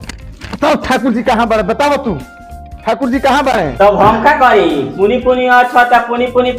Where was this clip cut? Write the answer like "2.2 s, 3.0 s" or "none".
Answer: 3.7 s